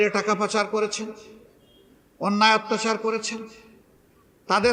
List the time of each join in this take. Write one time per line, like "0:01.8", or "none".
none

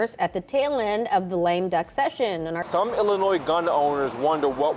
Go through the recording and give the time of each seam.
0:02.6

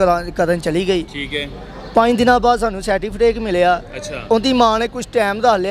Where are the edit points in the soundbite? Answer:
none

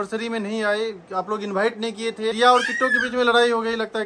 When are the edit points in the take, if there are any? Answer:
0:02.3

